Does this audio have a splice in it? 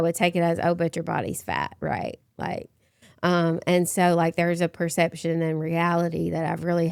no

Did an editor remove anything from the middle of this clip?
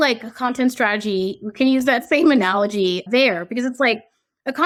no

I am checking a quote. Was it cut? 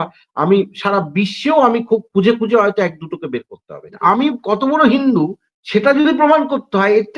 yes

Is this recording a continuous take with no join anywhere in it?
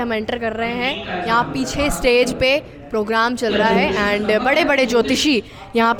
yes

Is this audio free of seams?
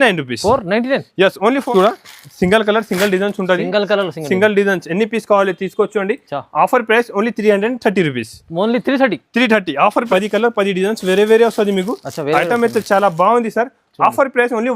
no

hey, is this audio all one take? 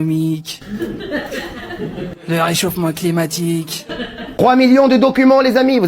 no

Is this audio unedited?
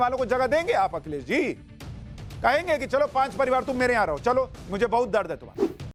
yes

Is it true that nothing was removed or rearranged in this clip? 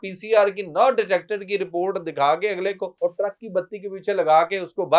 no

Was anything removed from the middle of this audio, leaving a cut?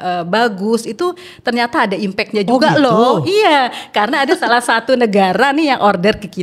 no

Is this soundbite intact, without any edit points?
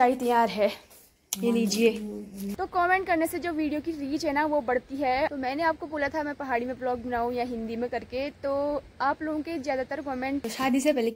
no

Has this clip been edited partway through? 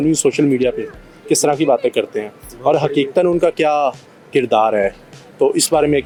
no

